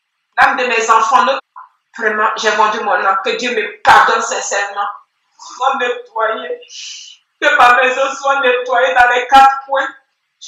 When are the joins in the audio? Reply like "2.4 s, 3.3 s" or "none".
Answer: 1.4 s, 5.5 s

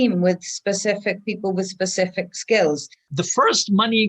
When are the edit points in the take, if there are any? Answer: 3.1 s

